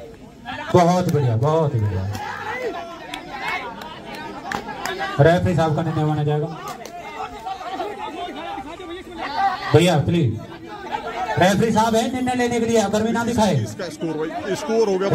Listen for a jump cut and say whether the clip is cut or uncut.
uncut